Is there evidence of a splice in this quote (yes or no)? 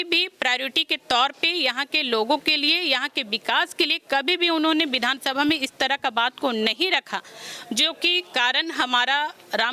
no